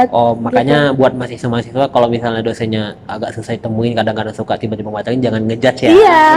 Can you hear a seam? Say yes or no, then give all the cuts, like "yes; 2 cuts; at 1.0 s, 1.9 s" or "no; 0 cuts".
no; 0 cuts